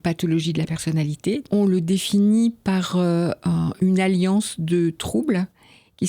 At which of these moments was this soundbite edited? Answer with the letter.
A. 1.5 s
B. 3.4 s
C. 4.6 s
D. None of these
A